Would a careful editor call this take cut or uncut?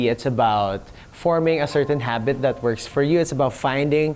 uncut